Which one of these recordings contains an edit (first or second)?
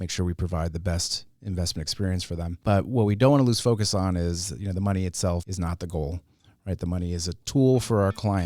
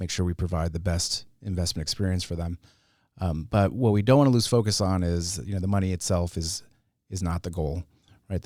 first